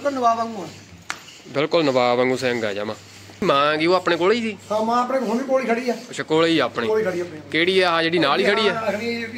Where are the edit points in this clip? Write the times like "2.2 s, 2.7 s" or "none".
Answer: 3.4 s